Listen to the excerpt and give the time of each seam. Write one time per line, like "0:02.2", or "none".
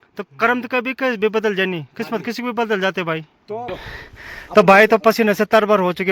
0:03.7